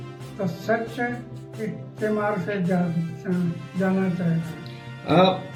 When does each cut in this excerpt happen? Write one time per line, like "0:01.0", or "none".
none